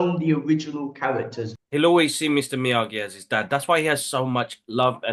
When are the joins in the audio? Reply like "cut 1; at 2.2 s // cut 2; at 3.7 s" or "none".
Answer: cut 1; at 1.5 s